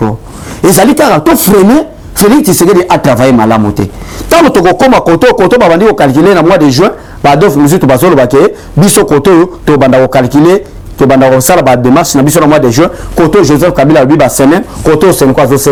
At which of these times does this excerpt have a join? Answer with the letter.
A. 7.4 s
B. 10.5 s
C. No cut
C